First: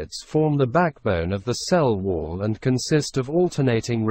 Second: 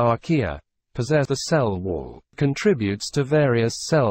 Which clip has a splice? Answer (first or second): second